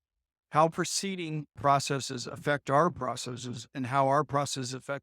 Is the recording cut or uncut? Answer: cut